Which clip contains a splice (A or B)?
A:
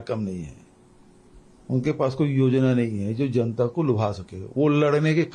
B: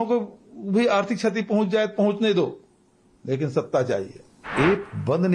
B